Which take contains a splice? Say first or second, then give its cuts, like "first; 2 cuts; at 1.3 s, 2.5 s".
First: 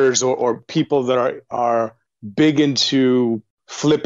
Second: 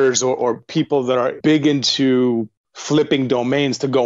second; 1 cut; at 1.4 s